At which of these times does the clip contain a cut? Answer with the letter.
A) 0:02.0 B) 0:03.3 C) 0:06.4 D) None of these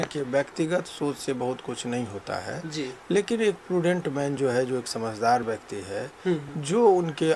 D